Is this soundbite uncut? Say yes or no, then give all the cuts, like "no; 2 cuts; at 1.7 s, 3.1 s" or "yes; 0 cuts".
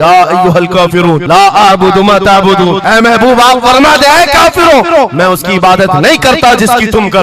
yes; 0 cuts